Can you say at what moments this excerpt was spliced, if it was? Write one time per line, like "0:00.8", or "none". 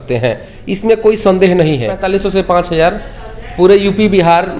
0:02.1